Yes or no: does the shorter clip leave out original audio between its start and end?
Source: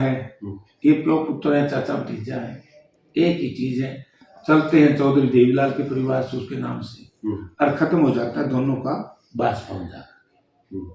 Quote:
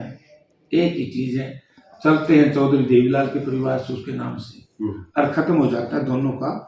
no